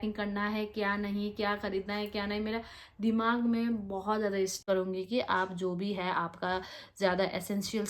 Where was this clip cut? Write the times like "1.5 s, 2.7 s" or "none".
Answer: 4.6 s